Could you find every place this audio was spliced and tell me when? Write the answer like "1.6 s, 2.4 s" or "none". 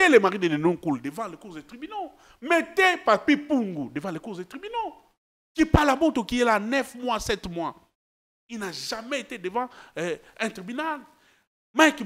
none